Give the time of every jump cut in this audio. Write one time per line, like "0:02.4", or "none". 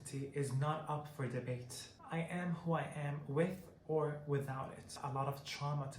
0:04.9